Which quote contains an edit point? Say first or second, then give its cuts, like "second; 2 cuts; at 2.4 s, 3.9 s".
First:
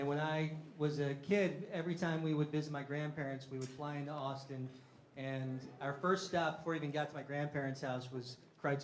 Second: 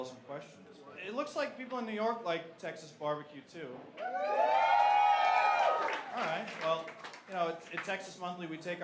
second; 1 cut; at 1.6 s